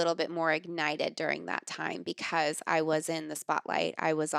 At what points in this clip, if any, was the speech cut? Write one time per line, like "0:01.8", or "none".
none